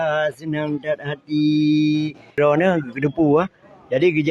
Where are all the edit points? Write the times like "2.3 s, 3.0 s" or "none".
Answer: 2.3 s